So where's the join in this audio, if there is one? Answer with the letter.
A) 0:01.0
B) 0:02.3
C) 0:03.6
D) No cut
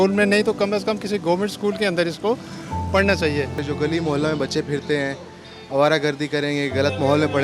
C